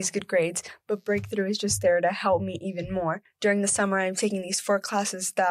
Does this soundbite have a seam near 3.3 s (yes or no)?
yes